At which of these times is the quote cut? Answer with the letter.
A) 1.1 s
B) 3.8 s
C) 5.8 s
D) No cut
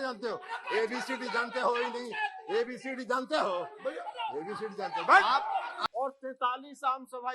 C